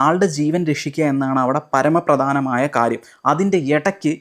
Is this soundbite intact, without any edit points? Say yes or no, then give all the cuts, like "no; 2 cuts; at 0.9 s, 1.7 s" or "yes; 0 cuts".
yes; 0 cuts